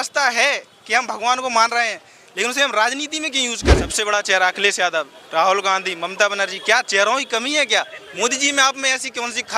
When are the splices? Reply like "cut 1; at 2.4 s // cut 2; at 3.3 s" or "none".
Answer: cut 1; at 4.0 s